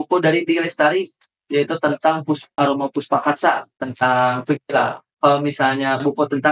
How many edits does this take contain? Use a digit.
3